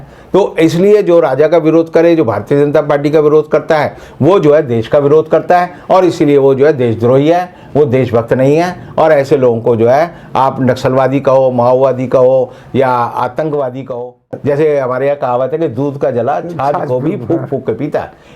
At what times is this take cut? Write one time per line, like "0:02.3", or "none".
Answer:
0:14.3